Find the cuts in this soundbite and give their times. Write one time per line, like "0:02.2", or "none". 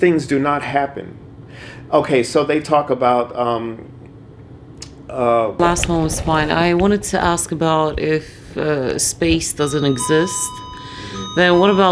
0:05.6